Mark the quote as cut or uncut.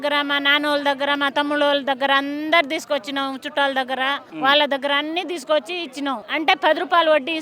cut